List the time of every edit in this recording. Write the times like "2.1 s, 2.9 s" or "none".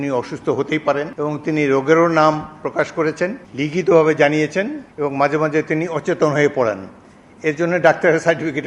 1.1 s, 3.4 s, 4.8 s